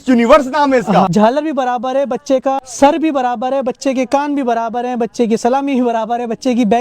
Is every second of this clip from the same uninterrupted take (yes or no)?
no